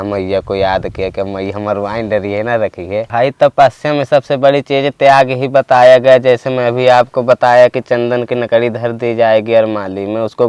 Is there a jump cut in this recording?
yes; 1 cut; at 3.1 s

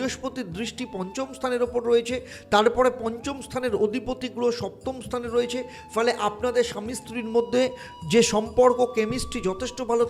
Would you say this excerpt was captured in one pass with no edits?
yes; 0 cuts

